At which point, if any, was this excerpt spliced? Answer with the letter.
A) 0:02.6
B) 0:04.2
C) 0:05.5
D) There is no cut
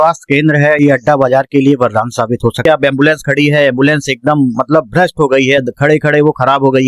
A